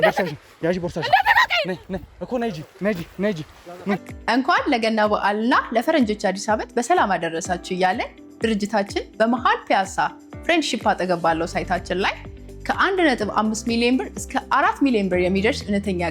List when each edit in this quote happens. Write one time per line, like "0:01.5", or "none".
0:04.0